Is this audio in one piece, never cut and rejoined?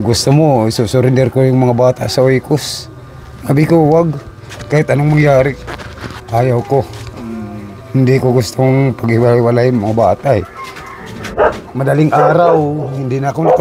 no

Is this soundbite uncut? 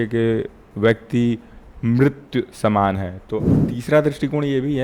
no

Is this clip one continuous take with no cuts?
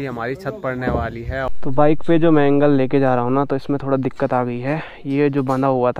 no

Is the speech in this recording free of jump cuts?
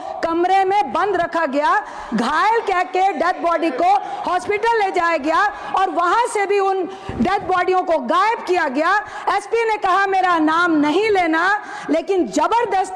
yes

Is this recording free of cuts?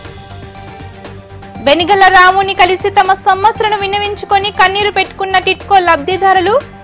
yes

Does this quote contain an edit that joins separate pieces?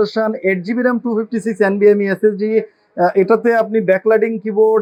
no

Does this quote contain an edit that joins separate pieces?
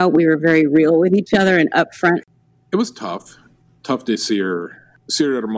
yes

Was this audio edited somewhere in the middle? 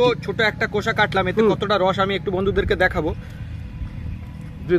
no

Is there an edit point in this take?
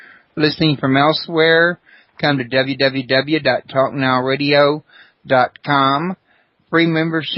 yes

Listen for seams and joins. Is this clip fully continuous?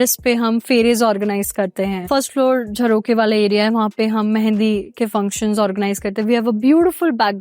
yes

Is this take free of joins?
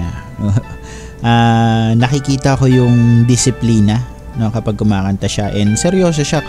yes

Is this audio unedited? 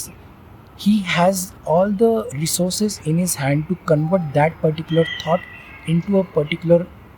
yes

